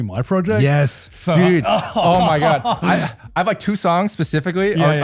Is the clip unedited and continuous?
yes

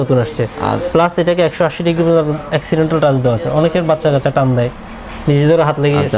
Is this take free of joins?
yes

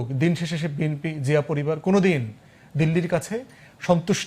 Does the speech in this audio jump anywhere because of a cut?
no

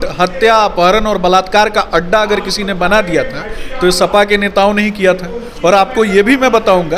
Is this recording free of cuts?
yes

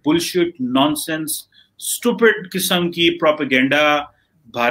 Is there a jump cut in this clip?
no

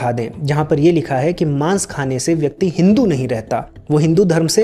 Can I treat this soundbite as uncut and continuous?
yes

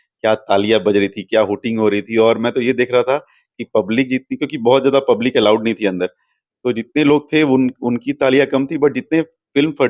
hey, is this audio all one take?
yes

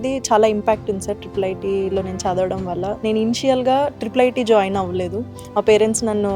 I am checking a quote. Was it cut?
no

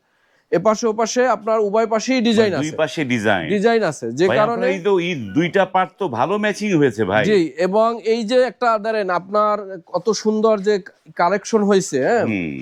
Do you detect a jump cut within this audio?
no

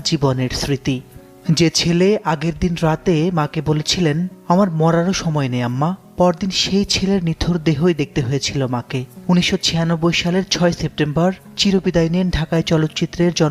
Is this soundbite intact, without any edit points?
yes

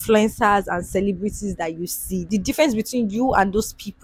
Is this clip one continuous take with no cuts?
yes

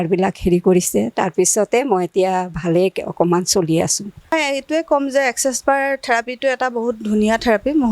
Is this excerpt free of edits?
no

